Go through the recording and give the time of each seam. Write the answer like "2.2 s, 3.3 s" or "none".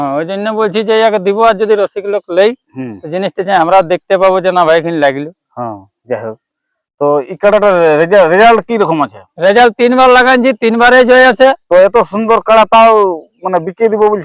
11.6 s